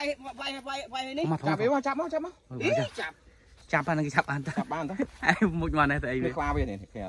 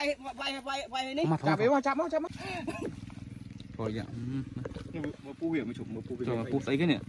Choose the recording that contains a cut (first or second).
second